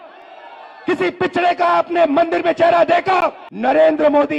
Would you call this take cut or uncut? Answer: cut